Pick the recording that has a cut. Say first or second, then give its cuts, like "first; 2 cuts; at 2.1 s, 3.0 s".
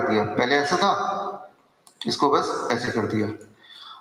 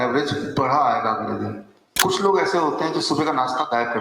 second; 1 cut; at 1.9 s